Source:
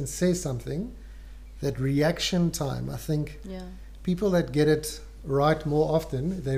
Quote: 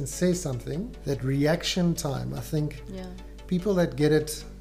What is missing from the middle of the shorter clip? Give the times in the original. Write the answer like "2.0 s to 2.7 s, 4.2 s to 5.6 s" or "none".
0.9 s to 1.5 s